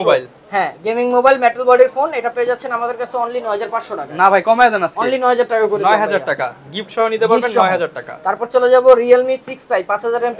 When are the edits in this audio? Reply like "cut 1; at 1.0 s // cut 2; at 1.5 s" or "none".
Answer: none

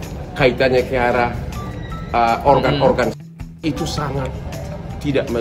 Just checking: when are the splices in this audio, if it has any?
none

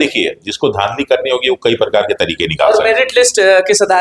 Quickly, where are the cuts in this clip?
none

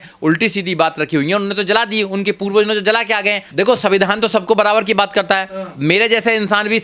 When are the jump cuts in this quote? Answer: cut 1; at 3.4 s

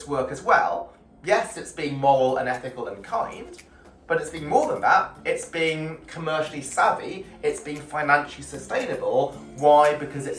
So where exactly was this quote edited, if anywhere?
none

